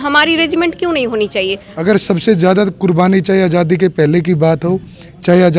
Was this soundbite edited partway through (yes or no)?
yes